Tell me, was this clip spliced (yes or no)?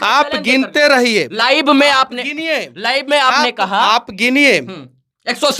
no